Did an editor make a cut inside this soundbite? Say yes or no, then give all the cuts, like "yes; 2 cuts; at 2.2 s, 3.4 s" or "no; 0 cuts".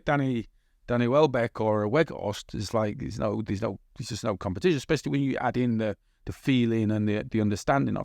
no; 0 cuts